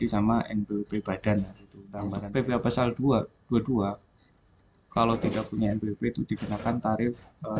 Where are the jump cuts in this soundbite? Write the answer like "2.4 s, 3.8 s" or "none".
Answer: 2.0 s